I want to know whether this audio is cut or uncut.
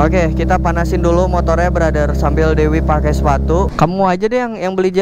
cut